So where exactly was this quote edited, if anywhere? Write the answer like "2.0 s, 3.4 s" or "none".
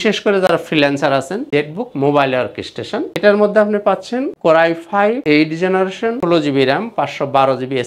1.4 s